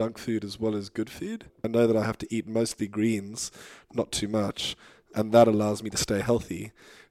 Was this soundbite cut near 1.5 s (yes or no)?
yes